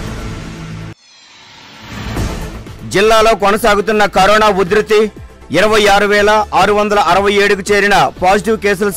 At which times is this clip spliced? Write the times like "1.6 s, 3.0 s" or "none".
none